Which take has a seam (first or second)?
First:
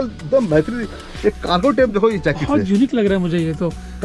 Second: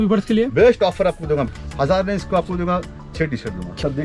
second